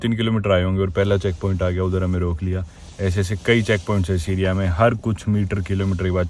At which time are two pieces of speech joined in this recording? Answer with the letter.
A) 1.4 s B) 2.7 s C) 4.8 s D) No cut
D